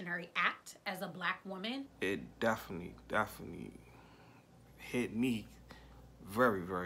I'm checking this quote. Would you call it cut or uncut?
cut